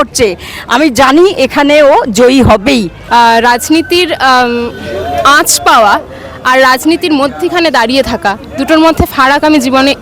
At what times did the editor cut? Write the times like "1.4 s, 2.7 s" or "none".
3.0 s